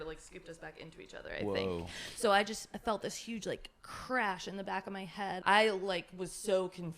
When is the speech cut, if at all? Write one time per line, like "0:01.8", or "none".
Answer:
0:05.4